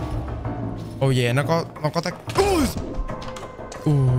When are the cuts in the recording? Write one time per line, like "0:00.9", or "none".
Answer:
0:02.7